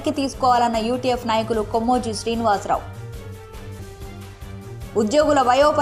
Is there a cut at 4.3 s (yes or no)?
no